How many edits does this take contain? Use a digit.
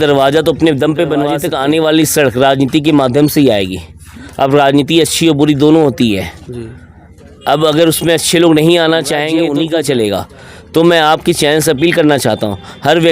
2